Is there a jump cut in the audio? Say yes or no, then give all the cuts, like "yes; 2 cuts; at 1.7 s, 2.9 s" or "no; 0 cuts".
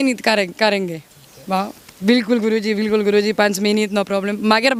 no; 0 cuts